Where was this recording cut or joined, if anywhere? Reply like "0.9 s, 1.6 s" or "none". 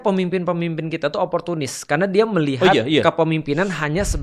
none